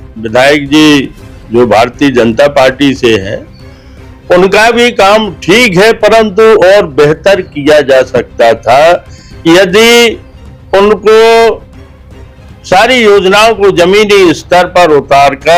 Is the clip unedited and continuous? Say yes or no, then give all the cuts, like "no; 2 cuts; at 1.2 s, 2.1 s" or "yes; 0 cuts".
yes; 0 cuts